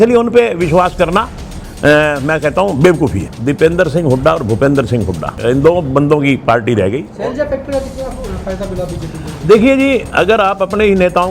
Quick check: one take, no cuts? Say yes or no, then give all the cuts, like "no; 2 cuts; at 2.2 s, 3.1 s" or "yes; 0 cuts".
no; 3 cuts; at 3.3 s, 5.3 s, 7.1 s